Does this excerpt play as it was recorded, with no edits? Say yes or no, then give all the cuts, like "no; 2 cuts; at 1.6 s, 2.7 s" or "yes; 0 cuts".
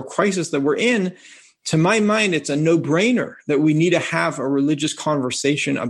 yes; 0 cuts